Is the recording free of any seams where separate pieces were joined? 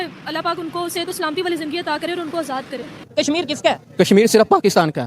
no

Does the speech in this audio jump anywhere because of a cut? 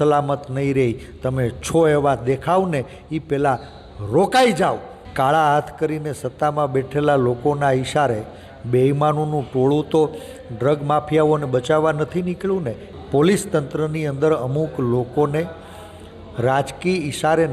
yes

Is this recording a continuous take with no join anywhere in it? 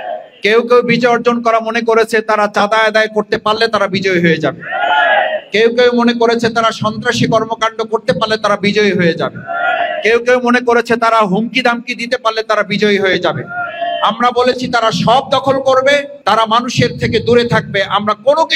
yes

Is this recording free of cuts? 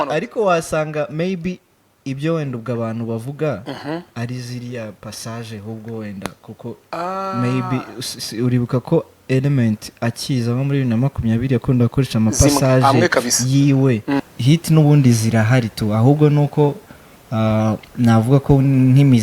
no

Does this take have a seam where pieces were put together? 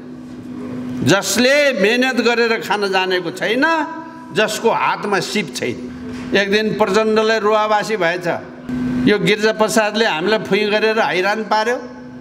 yes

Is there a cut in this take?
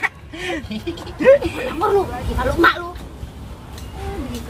yes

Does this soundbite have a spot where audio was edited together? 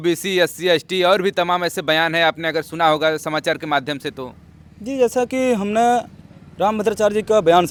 no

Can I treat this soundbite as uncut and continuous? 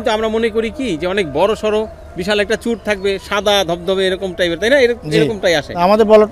yes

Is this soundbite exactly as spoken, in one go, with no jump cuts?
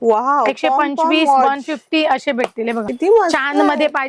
no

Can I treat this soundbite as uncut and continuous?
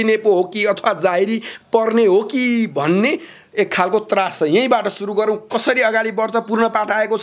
yes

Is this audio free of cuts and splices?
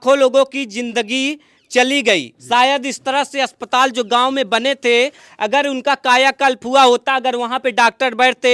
yes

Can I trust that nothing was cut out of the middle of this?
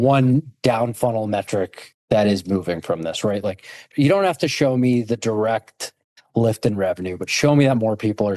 yes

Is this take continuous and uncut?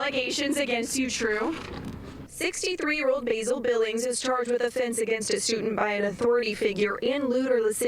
no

